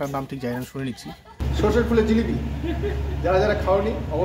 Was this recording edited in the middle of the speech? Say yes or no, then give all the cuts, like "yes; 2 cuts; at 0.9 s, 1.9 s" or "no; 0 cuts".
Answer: yes; 1 cut; at 1.4 s